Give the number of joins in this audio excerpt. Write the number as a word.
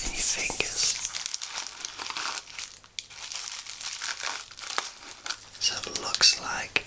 two